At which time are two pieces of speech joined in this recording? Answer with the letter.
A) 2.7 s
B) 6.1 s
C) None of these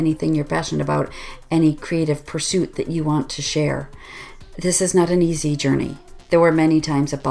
B